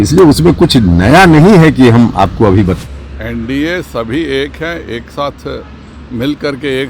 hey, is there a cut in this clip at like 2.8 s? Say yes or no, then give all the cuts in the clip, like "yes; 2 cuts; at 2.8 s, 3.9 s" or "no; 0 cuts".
yes; 1 cut; at 2.8 s